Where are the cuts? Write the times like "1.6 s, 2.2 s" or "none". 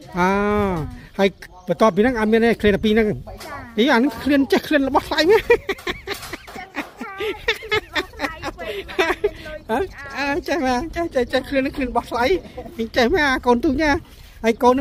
none